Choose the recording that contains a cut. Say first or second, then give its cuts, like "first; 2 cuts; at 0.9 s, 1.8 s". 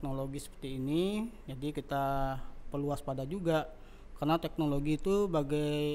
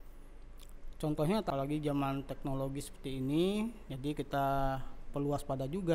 second; 1 cut; at 1.5 s